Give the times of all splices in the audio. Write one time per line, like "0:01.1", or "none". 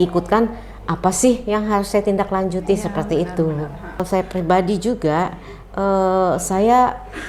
0:04.0